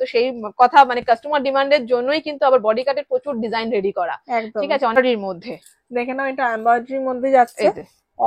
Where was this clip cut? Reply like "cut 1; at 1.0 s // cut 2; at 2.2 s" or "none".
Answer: cut 1; at 5.0 s